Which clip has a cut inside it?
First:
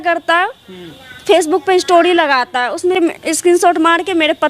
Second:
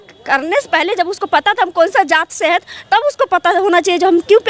first; 1 cut; at 3.0 s

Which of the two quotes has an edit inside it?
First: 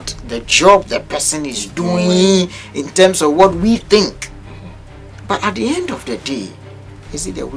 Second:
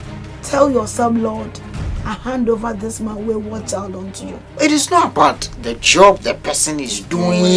second; 1 cut; at 4.4 s

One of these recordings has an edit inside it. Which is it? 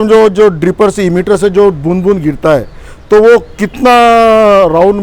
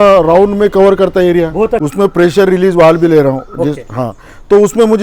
second; 1 cut; at 1.8 s

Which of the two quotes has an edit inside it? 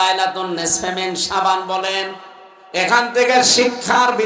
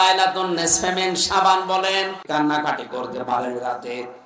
second; 1 cut; at 2.2 s

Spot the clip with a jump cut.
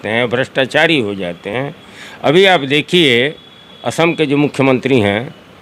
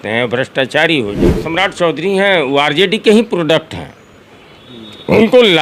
second; 1 cut; at 1.4 s

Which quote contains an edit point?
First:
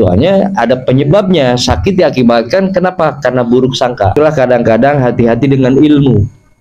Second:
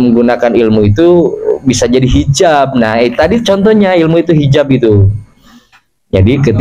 first; 1 cut; at 4.1 s

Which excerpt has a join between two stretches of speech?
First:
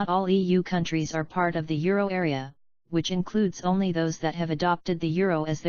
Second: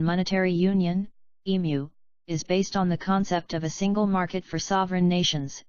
first; 1 cut; at 4.5 s

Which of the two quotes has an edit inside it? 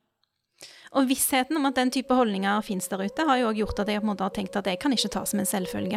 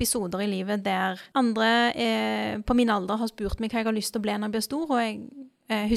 second; 1 cut; at 1.2 s

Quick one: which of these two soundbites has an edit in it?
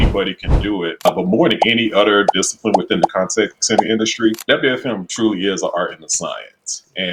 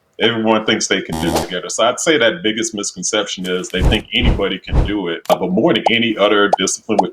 second; 1 cut; at 1.5 s

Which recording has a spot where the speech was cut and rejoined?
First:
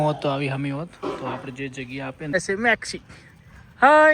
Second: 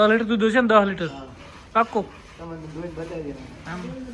first; 1 cut; at 2.3 s

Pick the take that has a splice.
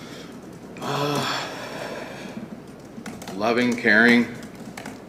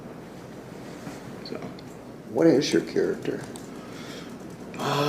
second; 1 cut; at 2.2 s

